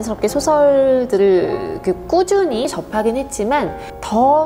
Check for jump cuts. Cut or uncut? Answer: uncut